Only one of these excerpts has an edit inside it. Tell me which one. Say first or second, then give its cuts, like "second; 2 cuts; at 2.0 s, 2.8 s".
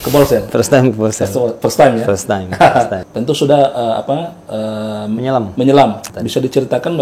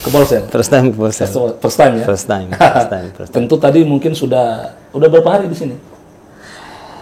first; 2 cuts; at 3.0 s, 6.0 s